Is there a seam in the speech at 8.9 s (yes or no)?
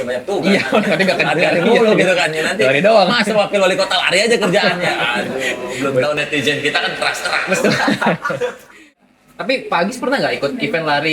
yes